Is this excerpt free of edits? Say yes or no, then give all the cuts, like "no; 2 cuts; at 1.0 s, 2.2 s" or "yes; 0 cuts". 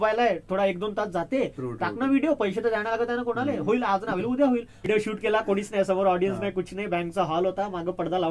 no; 1 cut; at 4.9 s